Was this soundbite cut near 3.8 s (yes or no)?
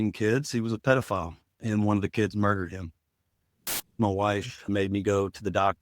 yes